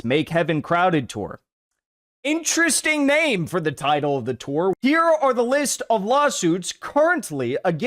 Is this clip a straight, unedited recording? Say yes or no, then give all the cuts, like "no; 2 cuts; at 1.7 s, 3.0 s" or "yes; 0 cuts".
no; 1 cut; at 4.8 s